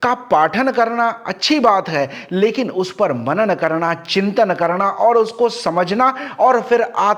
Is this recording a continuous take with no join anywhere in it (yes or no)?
yes